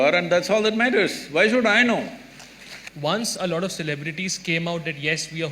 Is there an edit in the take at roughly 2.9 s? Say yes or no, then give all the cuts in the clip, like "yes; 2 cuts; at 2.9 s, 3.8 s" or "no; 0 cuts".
yes; 1 cut; at 2.9 s